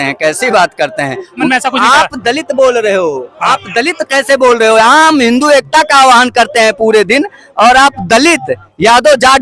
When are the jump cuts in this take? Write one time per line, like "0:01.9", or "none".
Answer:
0:01.4